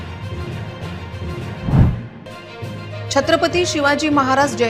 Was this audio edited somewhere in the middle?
no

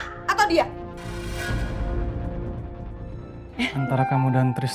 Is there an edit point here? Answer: yes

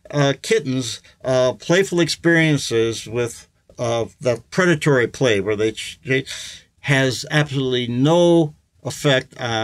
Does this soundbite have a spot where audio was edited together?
no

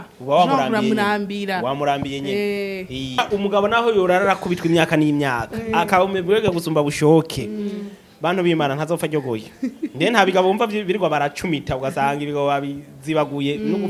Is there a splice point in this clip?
yes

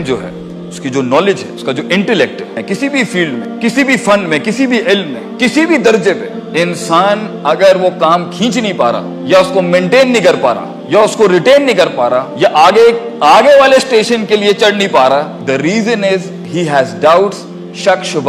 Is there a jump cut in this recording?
no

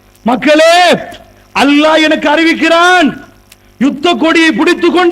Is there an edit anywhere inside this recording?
yes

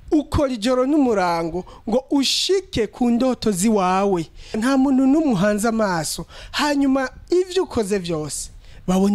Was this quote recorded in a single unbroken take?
no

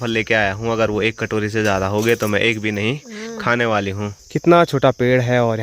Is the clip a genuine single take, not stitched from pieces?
no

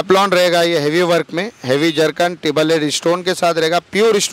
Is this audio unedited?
yes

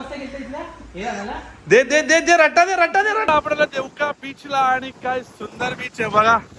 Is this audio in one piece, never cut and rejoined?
no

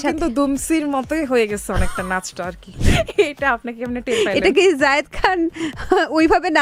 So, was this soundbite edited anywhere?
yes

